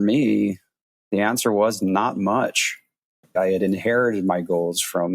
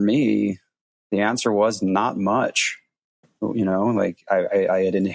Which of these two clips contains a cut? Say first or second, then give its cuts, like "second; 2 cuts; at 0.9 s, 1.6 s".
first; 1 cut; at 3.3 s